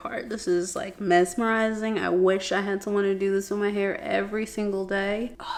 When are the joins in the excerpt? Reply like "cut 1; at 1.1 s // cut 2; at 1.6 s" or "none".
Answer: none